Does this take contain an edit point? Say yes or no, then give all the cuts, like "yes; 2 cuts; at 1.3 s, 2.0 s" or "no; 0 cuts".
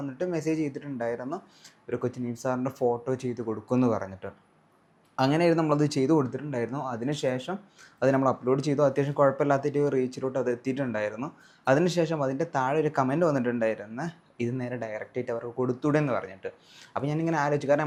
no; 0 cuts